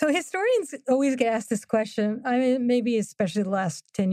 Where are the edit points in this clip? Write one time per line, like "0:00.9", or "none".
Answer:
none